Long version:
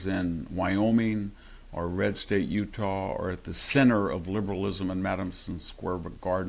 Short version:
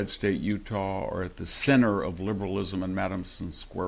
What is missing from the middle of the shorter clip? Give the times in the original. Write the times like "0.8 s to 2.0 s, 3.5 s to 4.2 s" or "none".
none